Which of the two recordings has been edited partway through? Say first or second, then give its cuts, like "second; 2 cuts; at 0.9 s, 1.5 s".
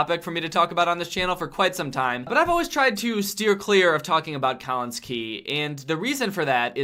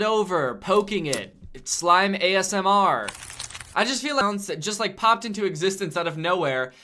second; 1 cut; at 4.2 s